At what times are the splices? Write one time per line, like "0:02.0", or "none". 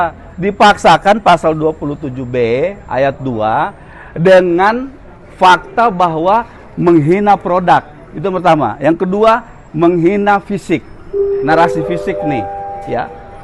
none

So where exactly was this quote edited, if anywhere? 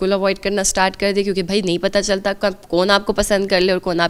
none

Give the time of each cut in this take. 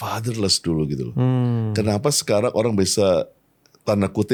none

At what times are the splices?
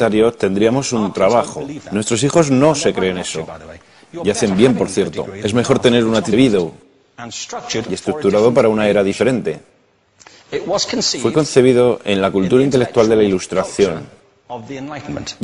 none

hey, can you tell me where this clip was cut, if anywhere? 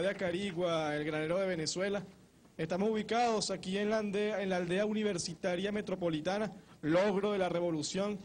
none

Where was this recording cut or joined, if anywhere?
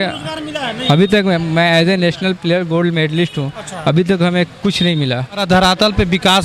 0:05.4

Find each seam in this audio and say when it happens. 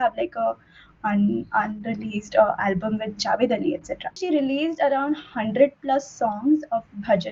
0:04.2

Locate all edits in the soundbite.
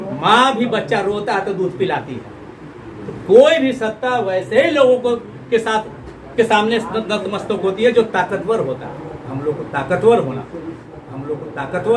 0:10.9

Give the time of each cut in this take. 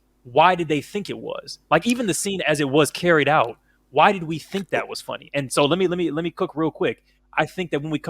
none

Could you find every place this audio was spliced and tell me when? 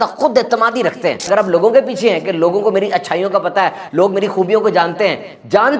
0:01.3

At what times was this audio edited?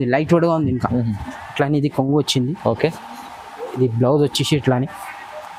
none

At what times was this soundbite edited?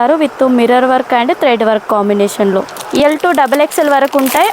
0:03.0

